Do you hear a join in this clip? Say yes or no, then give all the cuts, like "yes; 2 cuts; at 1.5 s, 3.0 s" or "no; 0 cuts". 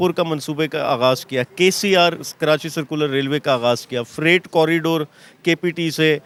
no; 0 cuts